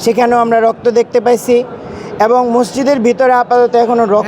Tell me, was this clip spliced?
no; 0 cuts

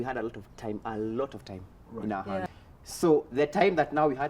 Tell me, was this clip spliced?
yes; 1 cut; at 2.5 s

